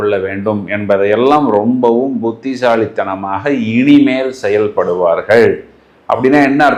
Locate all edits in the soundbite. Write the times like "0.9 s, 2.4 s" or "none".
none